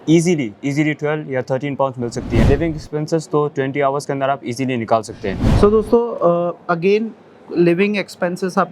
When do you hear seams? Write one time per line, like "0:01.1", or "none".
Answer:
0:02.4
0:05.5